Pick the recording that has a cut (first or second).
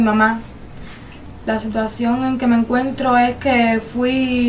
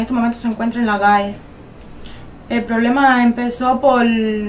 second